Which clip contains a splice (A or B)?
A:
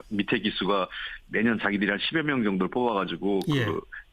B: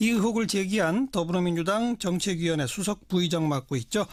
A